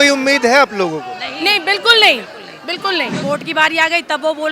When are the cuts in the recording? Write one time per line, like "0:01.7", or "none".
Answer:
0:03.2